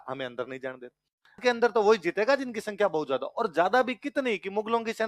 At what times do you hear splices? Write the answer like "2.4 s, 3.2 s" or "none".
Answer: 1.4 s

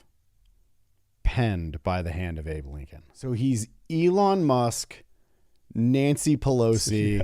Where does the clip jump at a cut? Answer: 3.1 s

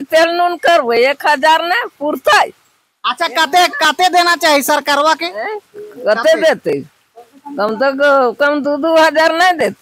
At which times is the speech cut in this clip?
none

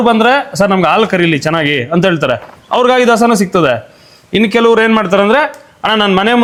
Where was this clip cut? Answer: none

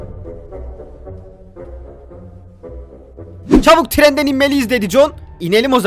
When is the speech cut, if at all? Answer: 3.5 s

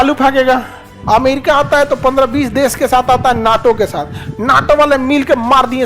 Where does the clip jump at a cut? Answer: 0.9 s

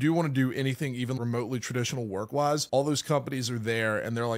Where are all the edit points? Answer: 1.2 s, 2.3 s

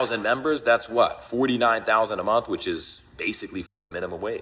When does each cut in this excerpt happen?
none

